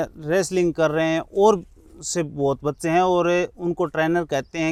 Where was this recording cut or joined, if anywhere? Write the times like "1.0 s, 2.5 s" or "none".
none